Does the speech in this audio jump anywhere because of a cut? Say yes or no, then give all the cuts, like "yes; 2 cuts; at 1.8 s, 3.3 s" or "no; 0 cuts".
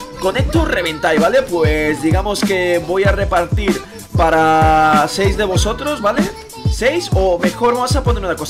no; 0 cuts